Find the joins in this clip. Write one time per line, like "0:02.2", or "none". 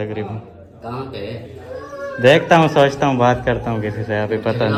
none